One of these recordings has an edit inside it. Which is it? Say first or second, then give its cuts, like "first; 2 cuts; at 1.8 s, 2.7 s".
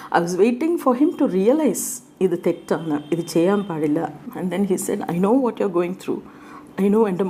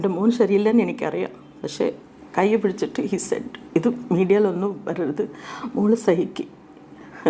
first; 1 cut; at 4.3 s